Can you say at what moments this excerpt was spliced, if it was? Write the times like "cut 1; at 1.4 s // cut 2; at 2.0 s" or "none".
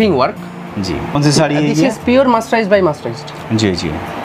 cut 1; at 1.1 s